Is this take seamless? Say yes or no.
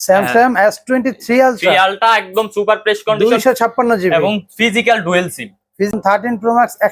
no